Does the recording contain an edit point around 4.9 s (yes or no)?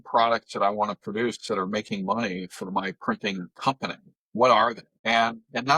yes